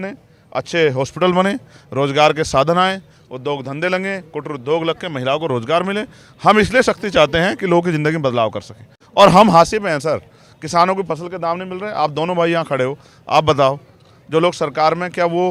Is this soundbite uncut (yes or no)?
yes